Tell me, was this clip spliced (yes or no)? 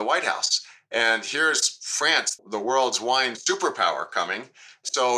no